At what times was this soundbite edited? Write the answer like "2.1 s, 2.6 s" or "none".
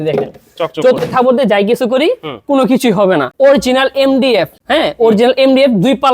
3.3 s, 4.6 s